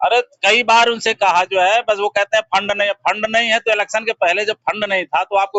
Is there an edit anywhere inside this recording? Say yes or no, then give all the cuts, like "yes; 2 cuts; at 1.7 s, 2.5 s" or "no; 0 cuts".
no; 0 cuts